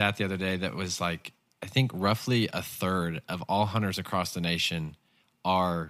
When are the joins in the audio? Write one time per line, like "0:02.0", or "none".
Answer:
none